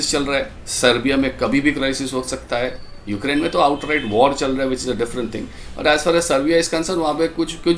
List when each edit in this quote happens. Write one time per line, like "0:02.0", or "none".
none